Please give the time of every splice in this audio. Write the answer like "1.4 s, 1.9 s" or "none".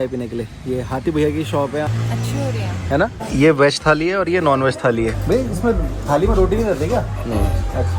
1.9 s, 3.2 s, 5.2 s